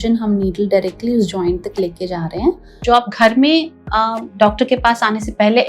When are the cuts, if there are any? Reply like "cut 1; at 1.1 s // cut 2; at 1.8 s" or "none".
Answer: cut 1; at 2.7 s